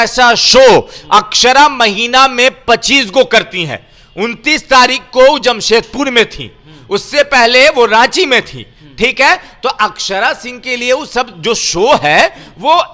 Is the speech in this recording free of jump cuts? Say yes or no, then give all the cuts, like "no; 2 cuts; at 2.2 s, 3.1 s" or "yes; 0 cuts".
yes; 0 cuts